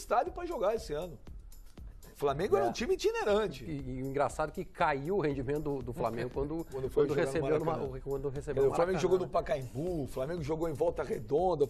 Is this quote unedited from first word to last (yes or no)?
yes